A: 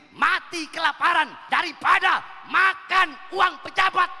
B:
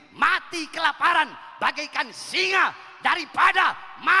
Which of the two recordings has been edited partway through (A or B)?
A